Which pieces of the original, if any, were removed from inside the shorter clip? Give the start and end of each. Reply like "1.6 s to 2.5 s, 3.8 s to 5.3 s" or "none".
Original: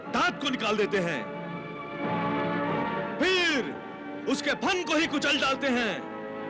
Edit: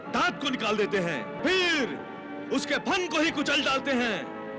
1.4 s to 3.1 s